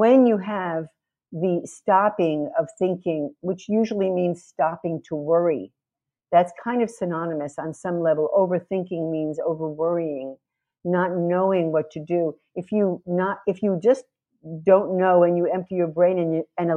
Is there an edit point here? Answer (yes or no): no